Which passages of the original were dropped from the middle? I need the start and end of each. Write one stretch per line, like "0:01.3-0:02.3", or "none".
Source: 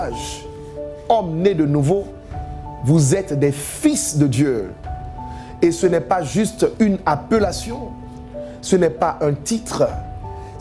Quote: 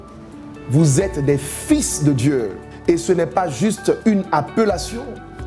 0:04.8-0:05.4